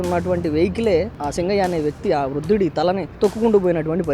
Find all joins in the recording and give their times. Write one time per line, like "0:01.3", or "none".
0:01.1
0:03.1